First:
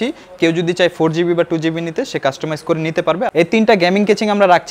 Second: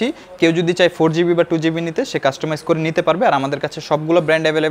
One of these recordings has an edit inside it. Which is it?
first; 1 cut; at 3.3 s

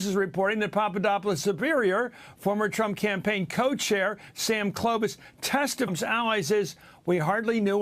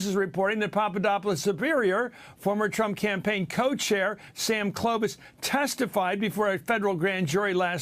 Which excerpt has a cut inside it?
second; 1 cut; at 5.9 s

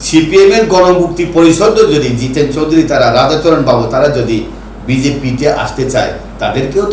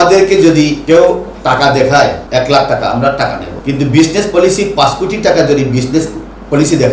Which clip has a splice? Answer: second; 3 cuts; at 0.8 s, 2.2 s, 3.5 s

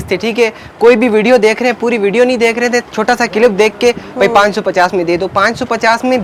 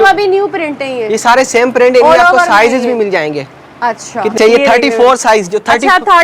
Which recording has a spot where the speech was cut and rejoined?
second; 1 cut; at 4.4 s

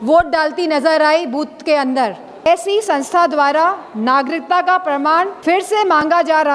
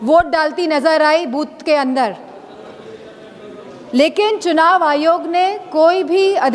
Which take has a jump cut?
first; 2 cuts; at 2.5 s, 5.4 s

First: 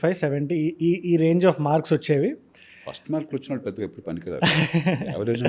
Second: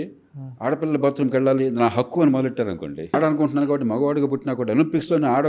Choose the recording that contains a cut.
second; 1 cut; at 3.1 s

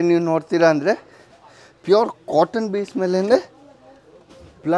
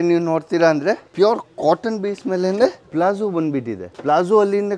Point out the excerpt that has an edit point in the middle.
second; 3 cuts; at 1.1 s, 2.8 s, 3.8 s

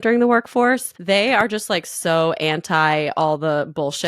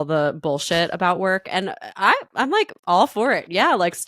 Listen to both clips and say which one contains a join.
first; 1 cut; at 0.9 s

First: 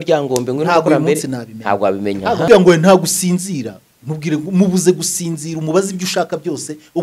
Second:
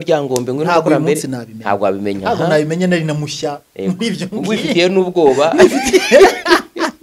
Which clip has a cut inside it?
first; 1 cut; at 2.4 s

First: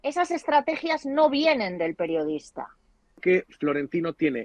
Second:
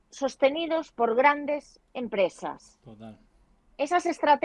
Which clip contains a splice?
first; 1 cut; at 3.2 s

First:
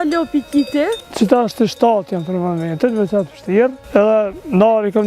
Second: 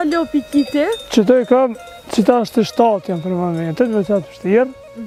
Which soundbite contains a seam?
first; 2 cuts; at 1.0 s, 3.8 s

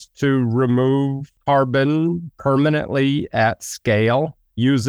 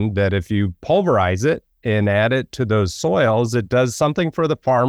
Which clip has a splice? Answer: first; 2 cuts; at 1.3 s, 2.3 s

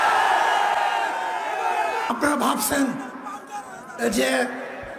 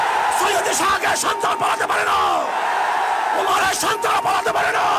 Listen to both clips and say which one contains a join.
first; 1 cut; at 2.1 s

